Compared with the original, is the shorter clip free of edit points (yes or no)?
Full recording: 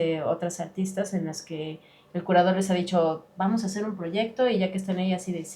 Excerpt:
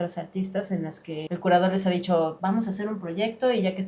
no